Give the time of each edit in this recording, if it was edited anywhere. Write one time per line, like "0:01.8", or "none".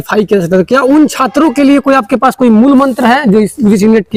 none